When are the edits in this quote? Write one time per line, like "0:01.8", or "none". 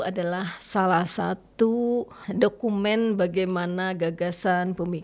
0:02.2